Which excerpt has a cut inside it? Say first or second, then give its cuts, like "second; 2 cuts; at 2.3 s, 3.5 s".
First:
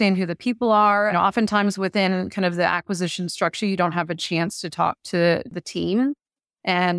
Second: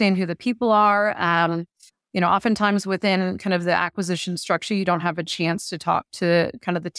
first; 2 cuts; at 1.1 s, 5.5 s